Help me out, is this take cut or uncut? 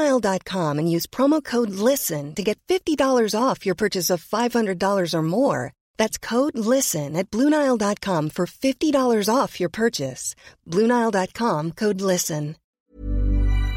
cut